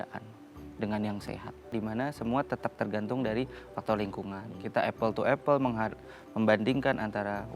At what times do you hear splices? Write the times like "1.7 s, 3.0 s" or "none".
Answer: 1.7 s